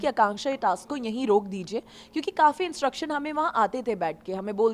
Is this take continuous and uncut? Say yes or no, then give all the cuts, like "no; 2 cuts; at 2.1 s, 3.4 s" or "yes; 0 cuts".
yes; 0 cuts